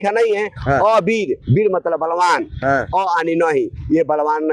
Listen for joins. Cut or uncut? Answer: uncut